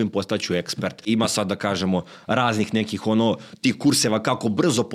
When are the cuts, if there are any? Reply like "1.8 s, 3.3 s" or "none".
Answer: none